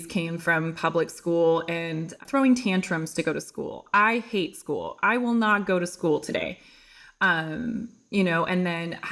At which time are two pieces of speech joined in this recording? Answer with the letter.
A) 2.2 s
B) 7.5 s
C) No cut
A